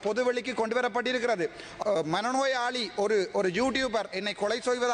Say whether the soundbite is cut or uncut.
cut